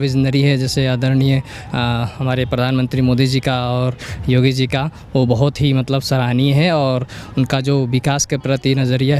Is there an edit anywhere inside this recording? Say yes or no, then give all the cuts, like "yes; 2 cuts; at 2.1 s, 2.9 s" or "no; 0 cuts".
no; 0 cuts